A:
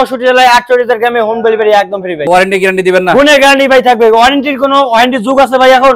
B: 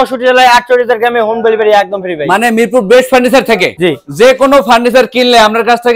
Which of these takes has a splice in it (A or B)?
A